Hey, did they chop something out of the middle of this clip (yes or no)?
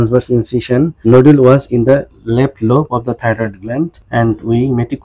yes